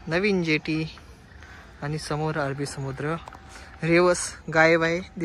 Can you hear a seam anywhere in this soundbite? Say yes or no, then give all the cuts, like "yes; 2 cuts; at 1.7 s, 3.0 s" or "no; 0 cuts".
no; 0 cuts